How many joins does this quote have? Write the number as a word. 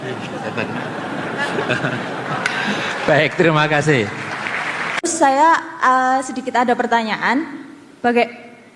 one